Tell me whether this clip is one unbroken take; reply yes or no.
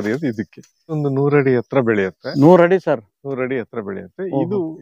no